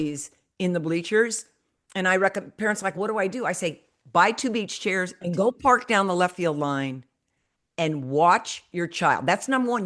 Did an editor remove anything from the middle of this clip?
yes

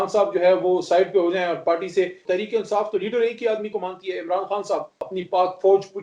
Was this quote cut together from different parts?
yes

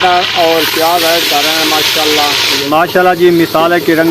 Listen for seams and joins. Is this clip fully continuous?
no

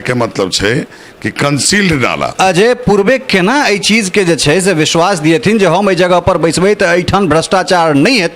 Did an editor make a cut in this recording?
yes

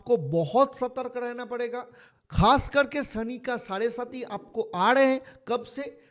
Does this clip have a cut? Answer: no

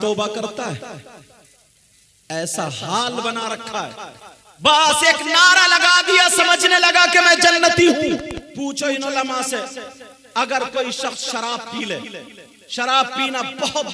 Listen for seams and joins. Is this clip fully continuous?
no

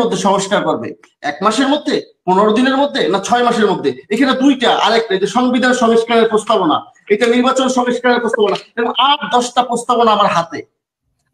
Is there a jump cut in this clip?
no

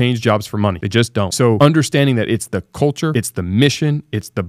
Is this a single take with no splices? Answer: no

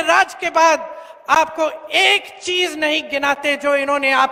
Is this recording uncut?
yes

